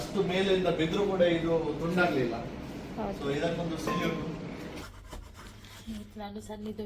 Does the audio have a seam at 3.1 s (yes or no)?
no